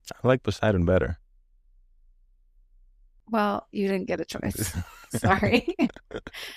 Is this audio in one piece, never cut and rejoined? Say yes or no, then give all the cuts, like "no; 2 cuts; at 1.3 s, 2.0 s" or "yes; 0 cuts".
yes; 0 cuts